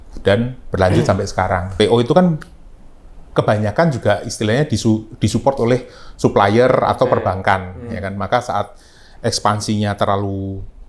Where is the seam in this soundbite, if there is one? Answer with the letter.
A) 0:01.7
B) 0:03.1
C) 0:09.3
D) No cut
A